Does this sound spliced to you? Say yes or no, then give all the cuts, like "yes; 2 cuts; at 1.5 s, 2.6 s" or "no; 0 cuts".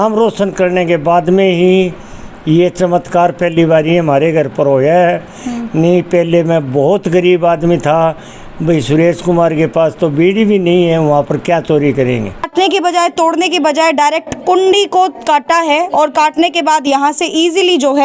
yes; 1 cut; at 12.5 s